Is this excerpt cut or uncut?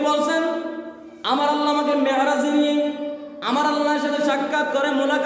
uncut